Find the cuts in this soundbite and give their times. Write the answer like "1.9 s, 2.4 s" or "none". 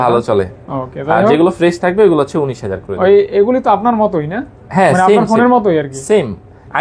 none